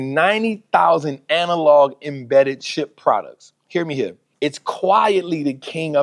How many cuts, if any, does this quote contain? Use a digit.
1